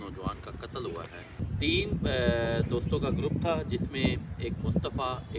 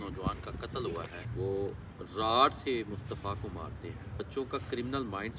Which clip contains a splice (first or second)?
second